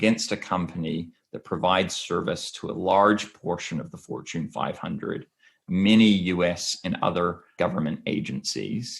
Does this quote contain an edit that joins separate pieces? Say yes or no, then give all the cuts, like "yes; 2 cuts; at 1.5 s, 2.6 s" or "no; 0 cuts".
yes; 1 cut; at 7.5 s